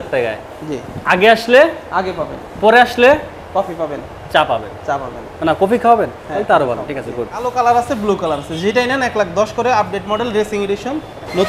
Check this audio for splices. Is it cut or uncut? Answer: cut